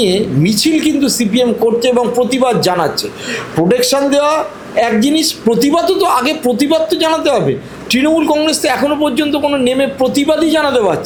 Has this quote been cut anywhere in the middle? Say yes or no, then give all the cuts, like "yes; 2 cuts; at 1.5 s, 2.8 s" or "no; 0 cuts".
no; 0 cuts